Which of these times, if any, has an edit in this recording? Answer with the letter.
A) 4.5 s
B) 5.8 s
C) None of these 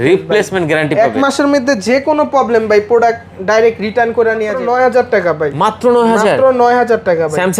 A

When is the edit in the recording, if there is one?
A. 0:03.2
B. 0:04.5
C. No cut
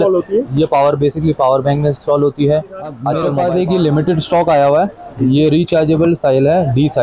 A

